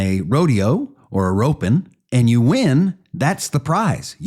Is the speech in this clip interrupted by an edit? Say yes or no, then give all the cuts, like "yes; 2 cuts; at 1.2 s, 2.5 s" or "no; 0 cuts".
yes; 1 cut; at 2.0 s